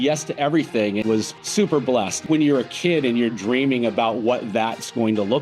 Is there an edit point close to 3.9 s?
no; 2 cuts; at 1.1 s, 2.2 s

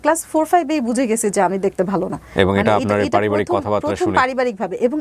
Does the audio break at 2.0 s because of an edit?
no; 0 cuts

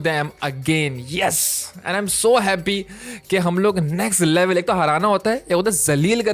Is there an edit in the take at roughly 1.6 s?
no; 0 cuts

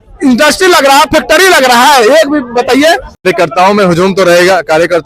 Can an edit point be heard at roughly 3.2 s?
yes; 1 cut; at 3.2 s

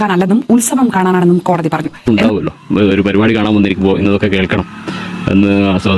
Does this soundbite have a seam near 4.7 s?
no; 1 cut; at 1.9 s

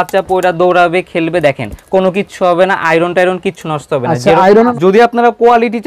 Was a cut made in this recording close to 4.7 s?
yes; 1 cut; at 4.7 s

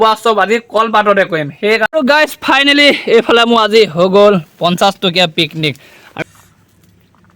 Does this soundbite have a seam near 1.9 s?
yes; 2 cuts; at 1.9 s, 6.2 s

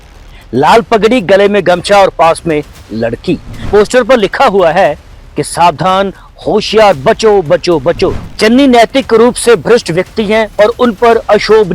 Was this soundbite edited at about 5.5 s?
no; 2 cuts; at 3.6 s, 8.2 s

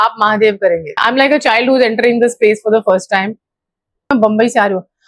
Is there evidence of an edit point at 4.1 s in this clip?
yes; 2 cuts; at 1.0 s, 4.1 s

